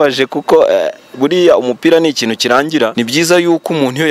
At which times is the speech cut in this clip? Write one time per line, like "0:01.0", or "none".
0:02.9